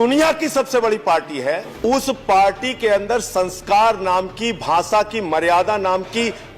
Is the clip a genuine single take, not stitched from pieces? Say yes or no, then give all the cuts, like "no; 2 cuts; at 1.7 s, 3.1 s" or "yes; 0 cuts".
no; 1 cut; at 1.7 s